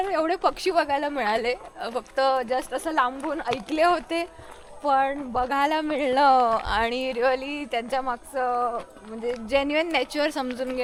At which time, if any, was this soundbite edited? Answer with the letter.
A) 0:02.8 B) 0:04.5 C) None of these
C